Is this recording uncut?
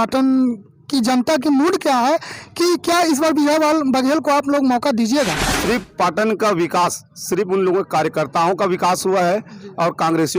no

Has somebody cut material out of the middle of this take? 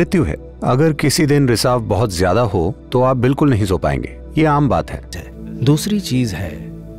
yes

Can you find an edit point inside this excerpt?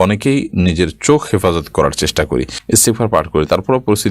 yes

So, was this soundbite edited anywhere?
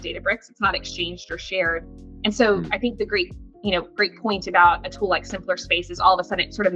no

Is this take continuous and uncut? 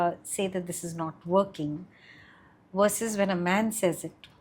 yes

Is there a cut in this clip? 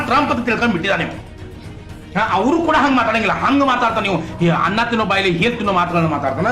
no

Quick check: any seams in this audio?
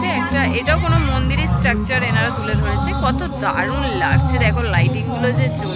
no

